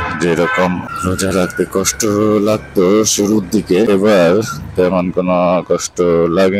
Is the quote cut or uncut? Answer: cut